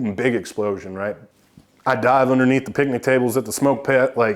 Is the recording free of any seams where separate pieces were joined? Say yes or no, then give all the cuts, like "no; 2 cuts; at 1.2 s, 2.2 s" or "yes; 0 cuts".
no; 1 cut; at 1.3 s